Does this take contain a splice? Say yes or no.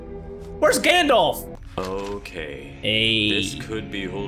yes